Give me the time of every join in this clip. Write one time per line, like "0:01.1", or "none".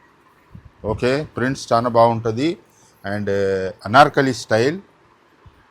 0:03.8